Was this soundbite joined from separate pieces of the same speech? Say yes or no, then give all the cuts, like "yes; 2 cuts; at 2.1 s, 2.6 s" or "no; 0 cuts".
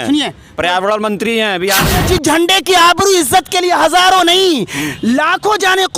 yes; 1 cut; at 2.0 s